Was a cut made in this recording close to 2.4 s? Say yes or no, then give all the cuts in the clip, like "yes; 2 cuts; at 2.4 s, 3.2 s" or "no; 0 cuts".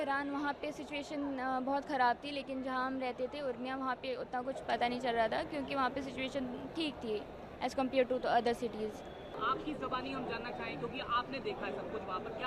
no; 0 cuts